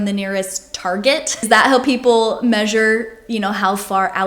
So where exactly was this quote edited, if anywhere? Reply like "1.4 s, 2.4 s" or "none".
none